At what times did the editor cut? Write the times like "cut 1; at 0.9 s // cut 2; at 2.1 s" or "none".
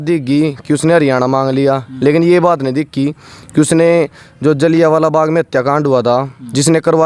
none